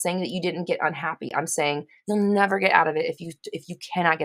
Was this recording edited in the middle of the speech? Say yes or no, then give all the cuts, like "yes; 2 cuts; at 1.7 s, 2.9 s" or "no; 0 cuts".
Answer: yes; 1 cut; at 1.9 s